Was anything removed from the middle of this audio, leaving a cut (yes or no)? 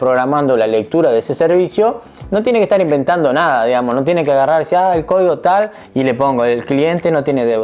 no